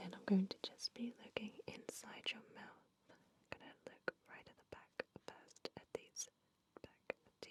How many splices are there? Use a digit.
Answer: 0